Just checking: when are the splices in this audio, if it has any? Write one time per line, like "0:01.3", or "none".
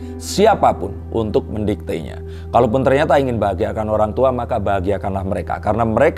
none